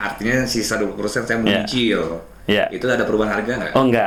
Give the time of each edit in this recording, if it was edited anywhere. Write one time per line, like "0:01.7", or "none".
none